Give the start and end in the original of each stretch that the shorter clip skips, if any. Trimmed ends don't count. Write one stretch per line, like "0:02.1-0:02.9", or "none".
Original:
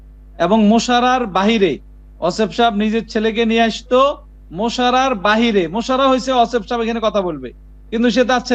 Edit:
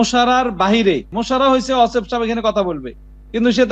0:01.9-0:05.8